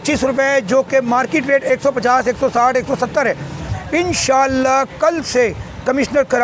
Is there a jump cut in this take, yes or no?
yes